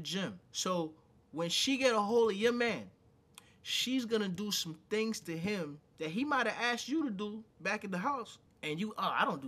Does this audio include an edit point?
no; 0 cuts

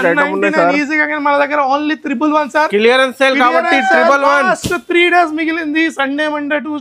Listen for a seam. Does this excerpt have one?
no; 0 cuts

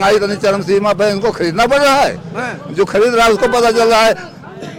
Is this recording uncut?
yes; 0 cuts

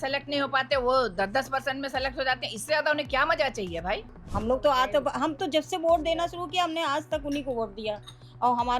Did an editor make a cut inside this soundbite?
yes; 1 cut; at 4.2 s

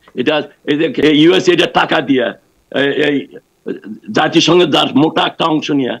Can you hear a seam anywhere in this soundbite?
yes; 1 cut; at 1.0 s

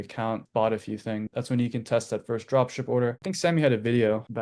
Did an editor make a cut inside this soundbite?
yes; 1 cut; at 3.2 s

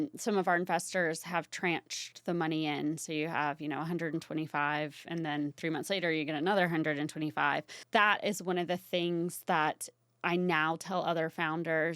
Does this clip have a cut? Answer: yes; 1 cut; at 7.7 s

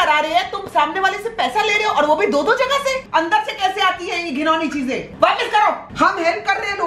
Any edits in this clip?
yes; 2 cuts; at 3.0 s, 5.9 s

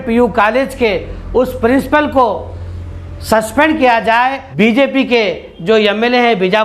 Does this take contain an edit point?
yes; 1 cut; at 4.4 s

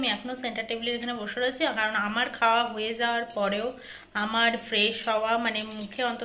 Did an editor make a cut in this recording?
no; 0 cuts

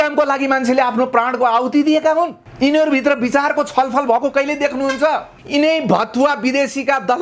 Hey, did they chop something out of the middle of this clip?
yes; 2 cuts; at 2.4 s, 5.3 s

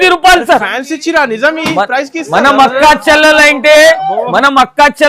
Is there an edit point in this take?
no; 0 cuts

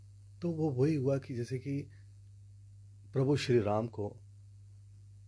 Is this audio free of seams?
yes; 0 cuts

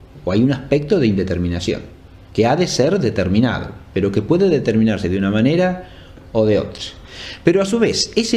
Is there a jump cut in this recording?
yes; 1 cut; at 6.4 s

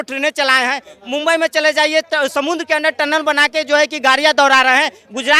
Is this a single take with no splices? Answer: yes; 0 cuts

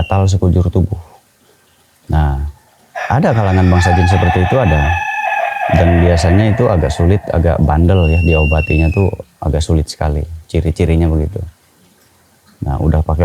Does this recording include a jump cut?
no; 0 cuts

